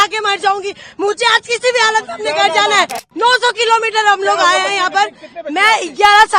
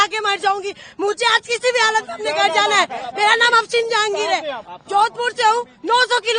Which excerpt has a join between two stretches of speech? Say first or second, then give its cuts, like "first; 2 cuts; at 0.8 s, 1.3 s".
first; 1 cut; at 3.1 s